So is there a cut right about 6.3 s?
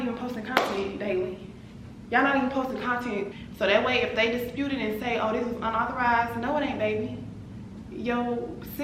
no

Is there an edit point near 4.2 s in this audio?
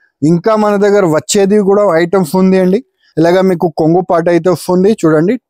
no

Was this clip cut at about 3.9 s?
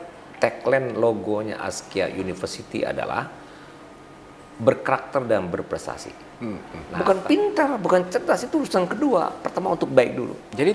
no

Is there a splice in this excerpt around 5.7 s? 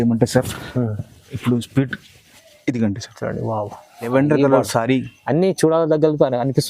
no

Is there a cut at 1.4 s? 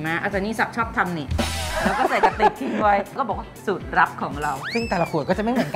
no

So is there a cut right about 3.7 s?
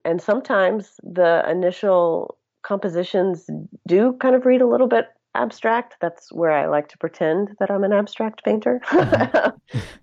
no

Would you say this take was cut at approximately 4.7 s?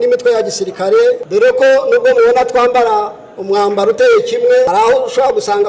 yes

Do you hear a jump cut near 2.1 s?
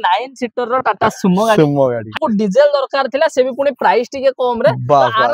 yes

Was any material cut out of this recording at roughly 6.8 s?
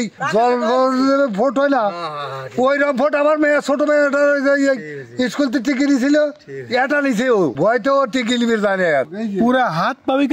no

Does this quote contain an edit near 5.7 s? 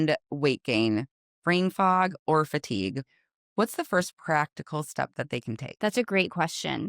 yes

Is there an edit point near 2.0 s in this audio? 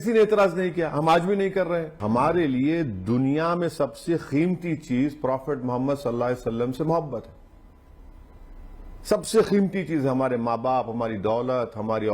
yes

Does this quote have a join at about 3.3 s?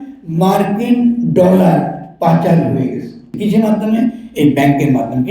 yes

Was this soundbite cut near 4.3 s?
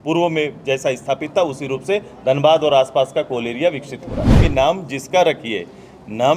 yes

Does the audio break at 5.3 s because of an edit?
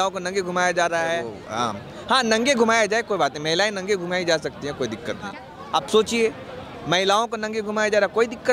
yes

